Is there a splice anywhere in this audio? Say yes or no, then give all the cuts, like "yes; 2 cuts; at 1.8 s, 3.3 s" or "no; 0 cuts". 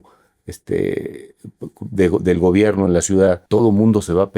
yes; 1 cut; at 3.4 s